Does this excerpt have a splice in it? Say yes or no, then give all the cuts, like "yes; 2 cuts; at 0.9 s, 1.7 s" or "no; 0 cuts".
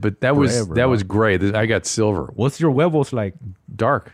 yes; 1 cut; at 2.3 s